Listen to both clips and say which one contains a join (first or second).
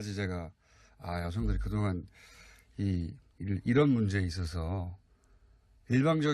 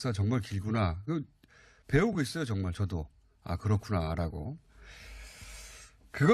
second